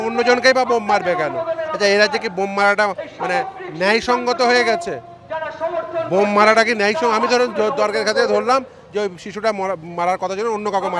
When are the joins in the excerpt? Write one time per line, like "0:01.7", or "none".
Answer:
none

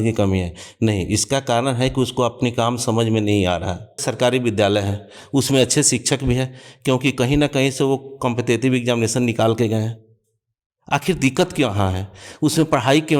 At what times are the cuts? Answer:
0:04.1

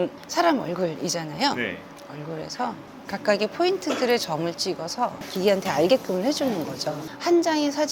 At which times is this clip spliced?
0:01.9
0:05.3
0:07.0

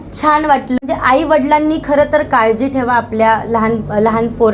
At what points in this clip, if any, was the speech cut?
0:00.9

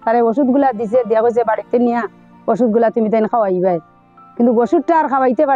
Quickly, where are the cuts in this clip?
none

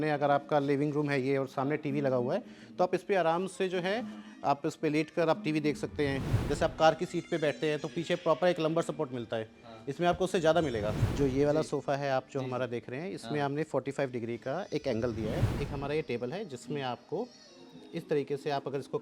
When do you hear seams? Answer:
0:06.3
0:11.0
0:15.4

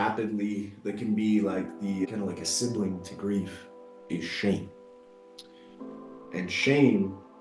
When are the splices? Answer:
none

